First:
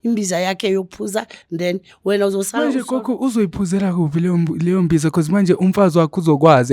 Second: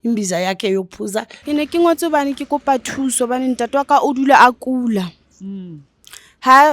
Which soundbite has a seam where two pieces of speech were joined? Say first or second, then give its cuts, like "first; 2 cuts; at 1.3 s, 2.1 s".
second; 1 cut; at 1.4 s